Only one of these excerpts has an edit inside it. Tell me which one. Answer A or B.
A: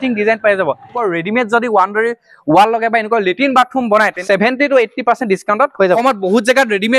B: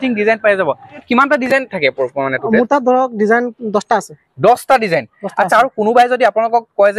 A